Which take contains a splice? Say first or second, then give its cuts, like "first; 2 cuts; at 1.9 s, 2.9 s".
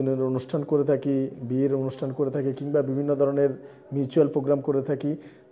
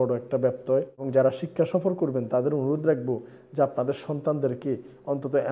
second; 1 cut; at 1.0 s